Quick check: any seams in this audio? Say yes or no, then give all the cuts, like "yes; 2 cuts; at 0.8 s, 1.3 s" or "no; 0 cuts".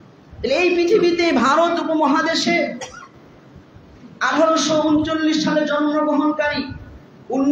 no; 0 cuts